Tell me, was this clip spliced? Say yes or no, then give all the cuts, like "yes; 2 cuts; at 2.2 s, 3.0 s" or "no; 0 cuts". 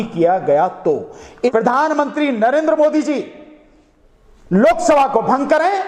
yes; 1 cut; at 1.5 s